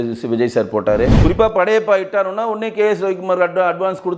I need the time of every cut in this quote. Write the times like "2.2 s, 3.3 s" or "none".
1.2 s